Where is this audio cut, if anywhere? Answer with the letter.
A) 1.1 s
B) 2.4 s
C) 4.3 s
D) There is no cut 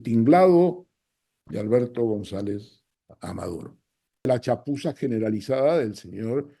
C